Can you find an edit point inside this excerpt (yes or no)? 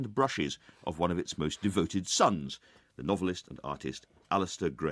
yes